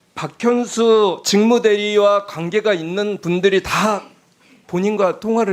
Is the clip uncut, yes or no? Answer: yes